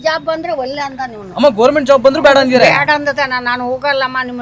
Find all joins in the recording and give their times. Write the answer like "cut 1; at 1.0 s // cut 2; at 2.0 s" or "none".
none